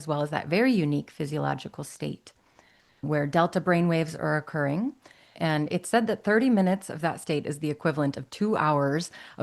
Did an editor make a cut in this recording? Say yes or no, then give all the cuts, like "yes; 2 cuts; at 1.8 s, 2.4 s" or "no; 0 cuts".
yes; 1 cut; at 5.3 s